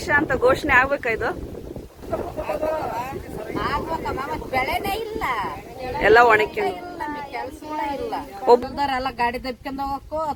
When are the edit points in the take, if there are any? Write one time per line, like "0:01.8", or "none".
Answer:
none